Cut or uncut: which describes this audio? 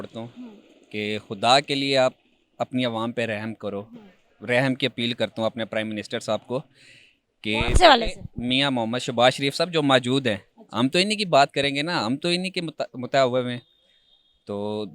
uncut